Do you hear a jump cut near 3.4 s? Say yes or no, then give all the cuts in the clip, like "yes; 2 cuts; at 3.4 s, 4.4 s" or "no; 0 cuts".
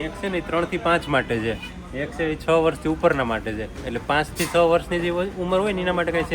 no; 0 cuts